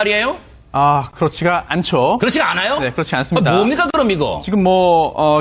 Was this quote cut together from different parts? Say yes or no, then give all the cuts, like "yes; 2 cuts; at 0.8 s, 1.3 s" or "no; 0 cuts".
yes; 1 cut; at 3.2 s